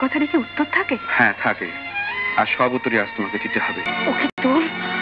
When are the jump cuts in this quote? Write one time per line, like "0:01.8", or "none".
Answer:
0:03.9